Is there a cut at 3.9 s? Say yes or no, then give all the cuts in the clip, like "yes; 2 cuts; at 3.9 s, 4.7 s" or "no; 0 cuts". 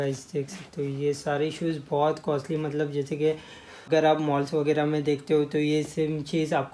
yes; 1 cut; at 3.9 s